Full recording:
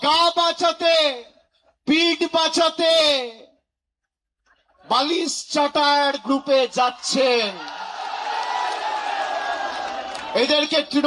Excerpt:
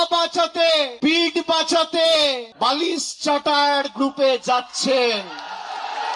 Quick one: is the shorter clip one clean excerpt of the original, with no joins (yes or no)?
no